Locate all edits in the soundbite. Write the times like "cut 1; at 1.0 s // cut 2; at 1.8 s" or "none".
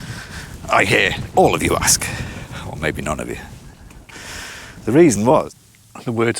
cut 1; at 5.5 s